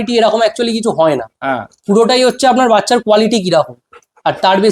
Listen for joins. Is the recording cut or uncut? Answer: uncut